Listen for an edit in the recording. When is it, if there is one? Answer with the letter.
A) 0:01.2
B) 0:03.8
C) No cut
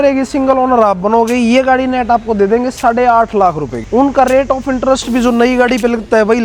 B